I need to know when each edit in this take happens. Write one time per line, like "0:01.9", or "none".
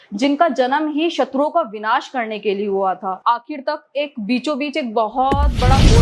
0:03.1